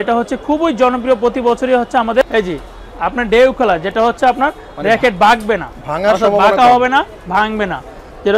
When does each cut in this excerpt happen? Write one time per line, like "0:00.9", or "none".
0:02.3